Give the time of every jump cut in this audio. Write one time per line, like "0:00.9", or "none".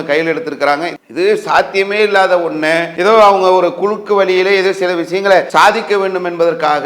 0:01.0
0:02.9
0:05.5